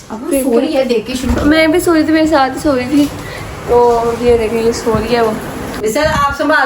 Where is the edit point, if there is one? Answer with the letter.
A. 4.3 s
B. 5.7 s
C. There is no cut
B